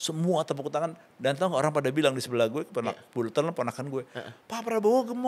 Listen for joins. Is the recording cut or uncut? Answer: uncut